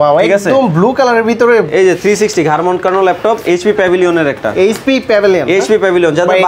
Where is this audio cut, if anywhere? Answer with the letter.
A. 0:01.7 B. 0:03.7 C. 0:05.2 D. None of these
A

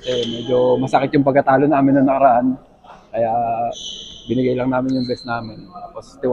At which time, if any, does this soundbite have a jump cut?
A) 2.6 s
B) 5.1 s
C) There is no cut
C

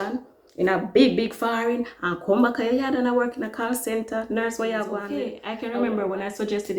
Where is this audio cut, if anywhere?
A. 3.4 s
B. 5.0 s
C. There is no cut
B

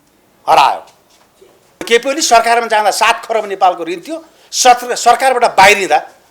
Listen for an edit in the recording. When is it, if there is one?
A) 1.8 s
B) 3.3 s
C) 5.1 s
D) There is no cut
A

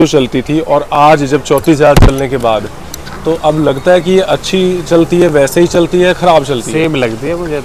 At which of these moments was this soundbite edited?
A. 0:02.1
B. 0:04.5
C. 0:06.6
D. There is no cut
D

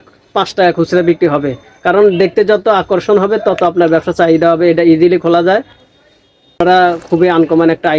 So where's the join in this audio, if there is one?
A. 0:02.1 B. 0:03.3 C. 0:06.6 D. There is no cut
C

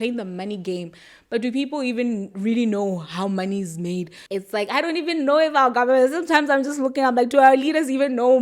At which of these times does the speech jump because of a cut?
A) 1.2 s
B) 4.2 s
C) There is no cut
B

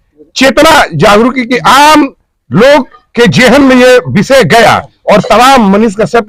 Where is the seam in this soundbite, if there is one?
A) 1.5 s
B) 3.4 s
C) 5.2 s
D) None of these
D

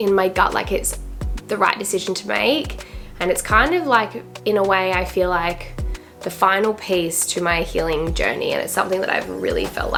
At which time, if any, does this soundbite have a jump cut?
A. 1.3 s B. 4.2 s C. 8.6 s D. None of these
D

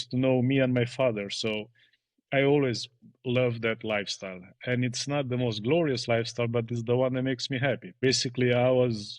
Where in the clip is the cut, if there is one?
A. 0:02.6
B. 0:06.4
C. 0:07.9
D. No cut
C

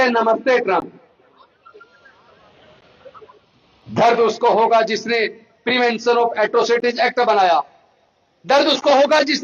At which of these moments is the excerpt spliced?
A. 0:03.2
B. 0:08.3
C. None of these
A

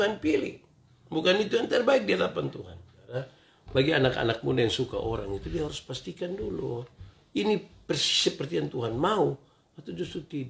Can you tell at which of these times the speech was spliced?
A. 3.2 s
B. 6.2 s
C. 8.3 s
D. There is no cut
A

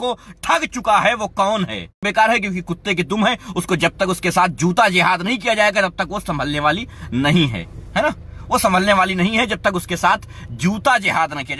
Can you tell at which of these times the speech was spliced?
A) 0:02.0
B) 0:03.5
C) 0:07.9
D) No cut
A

